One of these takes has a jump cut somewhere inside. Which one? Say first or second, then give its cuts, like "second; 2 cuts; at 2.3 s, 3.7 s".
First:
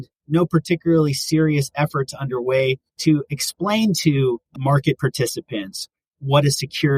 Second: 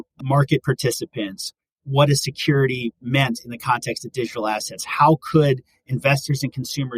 first; 1 cut; at 2.9 s